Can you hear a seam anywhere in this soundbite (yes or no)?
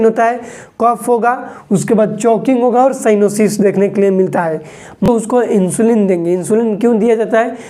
yes